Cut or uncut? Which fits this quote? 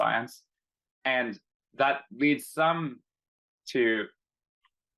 uncut